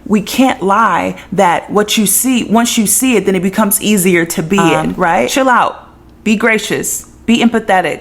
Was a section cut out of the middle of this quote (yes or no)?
yes